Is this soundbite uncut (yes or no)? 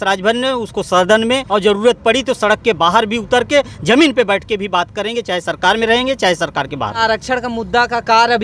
no